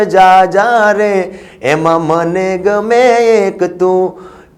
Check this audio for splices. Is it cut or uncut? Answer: uncut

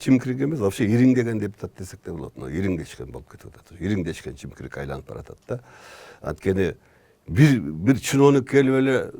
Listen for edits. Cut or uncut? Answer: uncut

